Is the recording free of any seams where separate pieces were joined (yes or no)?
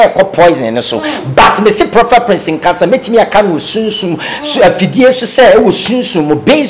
yes